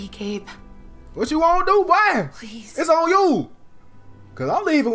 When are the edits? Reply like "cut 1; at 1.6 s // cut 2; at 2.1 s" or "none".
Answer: none

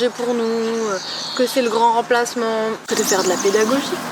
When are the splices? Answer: cut 1; at 2.8 s

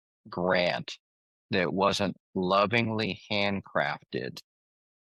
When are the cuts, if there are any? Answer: none

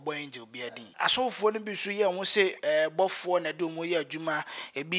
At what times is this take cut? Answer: cut 1; at 0.9 s

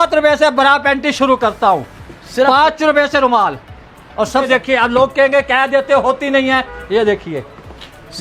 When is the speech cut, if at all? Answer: cut 1; at 4.5 s

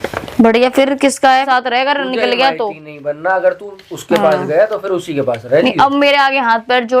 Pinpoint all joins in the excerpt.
cut 1; at 1.5 s

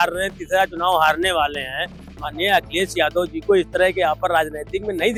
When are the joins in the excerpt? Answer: none

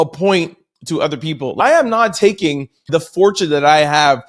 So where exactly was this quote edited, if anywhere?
cut 1; at 1.6 s // cut 2; at 2.9 s

